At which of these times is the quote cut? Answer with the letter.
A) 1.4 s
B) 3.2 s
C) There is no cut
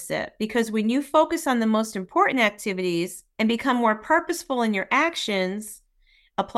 B